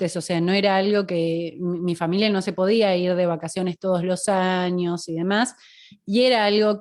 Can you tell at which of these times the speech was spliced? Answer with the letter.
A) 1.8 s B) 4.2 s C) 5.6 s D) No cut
D